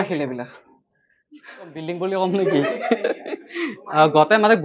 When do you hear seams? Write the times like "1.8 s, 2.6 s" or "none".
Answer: 1.8 s